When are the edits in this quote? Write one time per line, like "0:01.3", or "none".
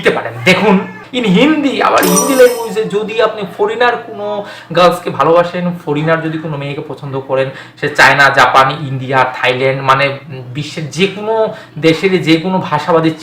0:01.0